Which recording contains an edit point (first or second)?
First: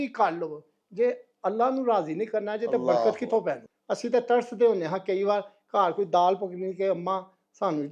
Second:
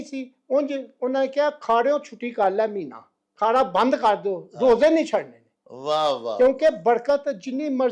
first